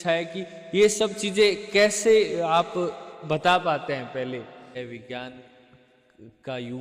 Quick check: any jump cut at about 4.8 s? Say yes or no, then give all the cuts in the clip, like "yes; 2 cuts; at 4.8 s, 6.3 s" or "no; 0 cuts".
yes; 1 cut; at 4.8 s